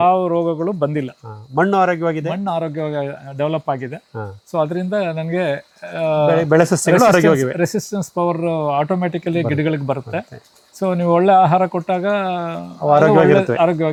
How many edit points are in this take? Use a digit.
0